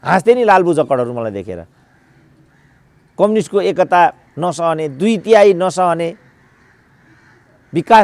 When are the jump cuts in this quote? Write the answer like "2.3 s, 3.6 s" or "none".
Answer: none

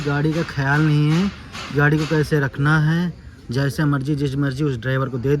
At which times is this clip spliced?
none

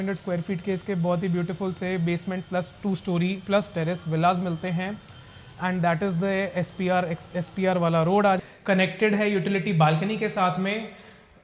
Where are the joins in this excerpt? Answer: 8.4 s

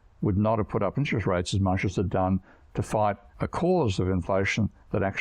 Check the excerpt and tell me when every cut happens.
3.3 s

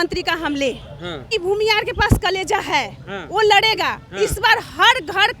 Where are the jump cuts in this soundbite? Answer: 1.3 s

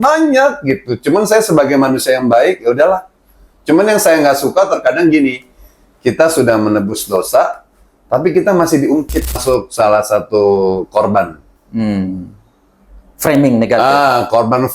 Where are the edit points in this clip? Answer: 9.4 s

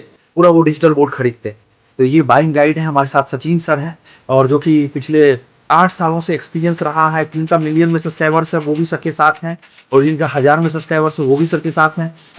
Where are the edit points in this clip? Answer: 7.4 s

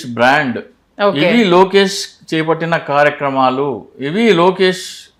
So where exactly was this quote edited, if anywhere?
none

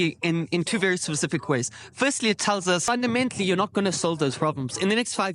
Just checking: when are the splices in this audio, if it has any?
2.8 s

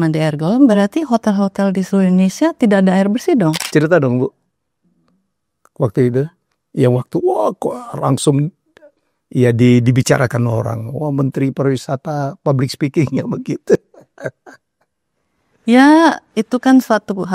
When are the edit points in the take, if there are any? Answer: 3.6 s

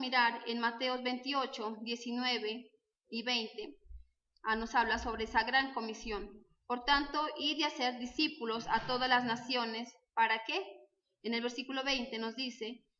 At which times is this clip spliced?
8.9 s

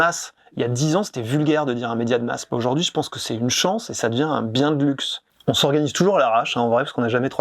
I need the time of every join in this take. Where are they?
none

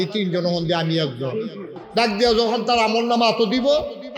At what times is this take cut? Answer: 2.0 s

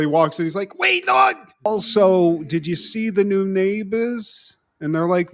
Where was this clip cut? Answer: 1.7 s

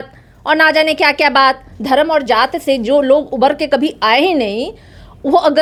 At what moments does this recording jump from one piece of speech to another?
none

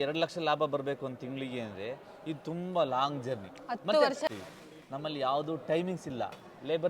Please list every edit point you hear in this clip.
4.3 s

